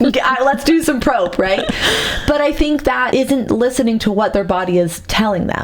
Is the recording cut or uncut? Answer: cut